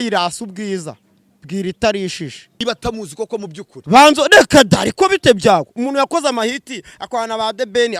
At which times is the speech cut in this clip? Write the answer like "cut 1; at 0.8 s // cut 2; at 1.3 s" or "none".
cut 1; at 2.6 s